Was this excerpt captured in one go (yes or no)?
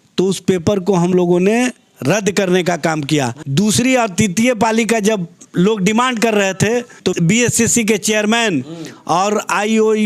no